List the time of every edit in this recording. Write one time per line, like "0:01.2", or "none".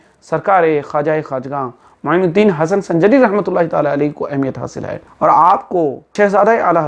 0:05.1
0:06.1